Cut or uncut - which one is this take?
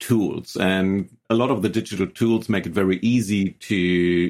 cut